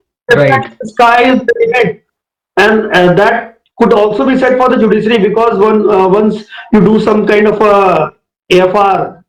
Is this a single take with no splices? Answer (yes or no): yes